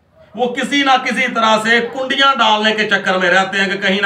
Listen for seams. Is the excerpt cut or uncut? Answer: uncut